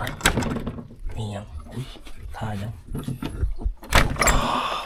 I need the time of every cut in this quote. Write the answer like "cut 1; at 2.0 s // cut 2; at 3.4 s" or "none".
none